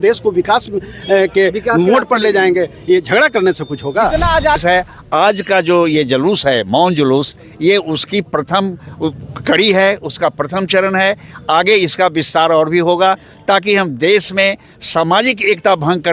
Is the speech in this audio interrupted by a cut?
yes; 1 cut; at 4.6 s

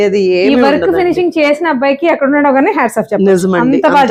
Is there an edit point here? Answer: no; 0 cuts

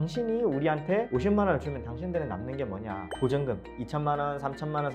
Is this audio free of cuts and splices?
no; 2 cuts; at 1.1 s, 3.0 s

